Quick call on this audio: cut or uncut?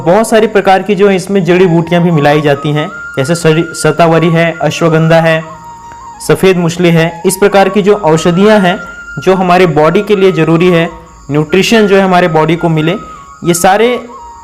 uncut